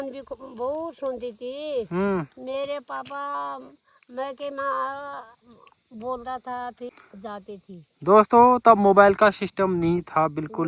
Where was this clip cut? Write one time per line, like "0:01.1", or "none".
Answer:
0:06.9